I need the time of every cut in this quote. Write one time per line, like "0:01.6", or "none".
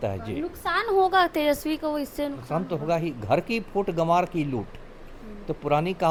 none